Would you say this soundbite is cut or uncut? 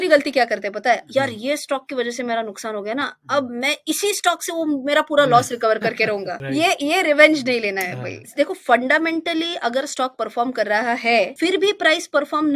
cut